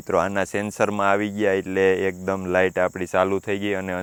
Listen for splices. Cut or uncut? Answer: uncut